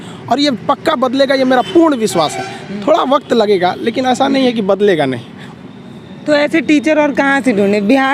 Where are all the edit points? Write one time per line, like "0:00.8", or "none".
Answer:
none